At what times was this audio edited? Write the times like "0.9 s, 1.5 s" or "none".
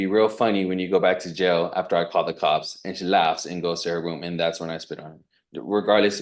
none